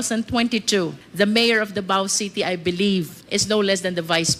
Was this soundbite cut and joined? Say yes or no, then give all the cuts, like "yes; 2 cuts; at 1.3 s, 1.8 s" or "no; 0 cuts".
yes; 2 cuts; at 1.0 s, 3.2 s